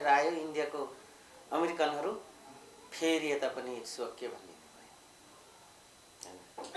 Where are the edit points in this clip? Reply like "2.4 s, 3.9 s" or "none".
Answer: none